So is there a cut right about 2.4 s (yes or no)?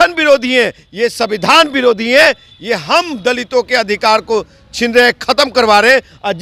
no